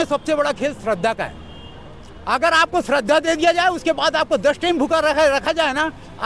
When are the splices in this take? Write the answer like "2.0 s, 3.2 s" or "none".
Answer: none